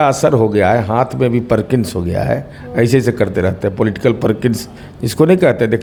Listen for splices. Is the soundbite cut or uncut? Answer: uncut